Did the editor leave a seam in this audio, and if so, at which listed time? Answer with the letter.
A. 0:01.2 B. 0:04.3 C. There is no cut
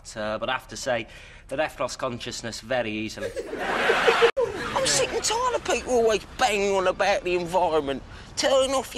B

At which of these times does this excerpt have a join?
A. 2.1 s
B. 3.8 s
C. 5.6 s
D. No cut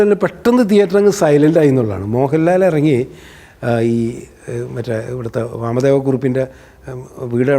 D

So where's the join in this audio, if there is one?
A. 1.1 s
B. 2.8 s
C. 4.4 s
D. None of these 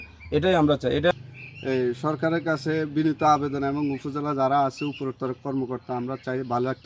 A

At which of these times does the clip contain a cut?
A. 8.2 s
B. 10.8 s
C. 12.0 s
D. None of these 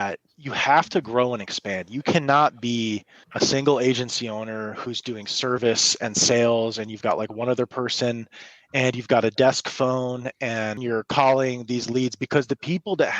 B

